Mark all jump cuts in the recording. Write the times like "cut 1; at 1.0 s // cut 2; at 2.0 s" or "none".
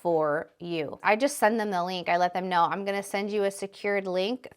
cut 1; at 0.9 s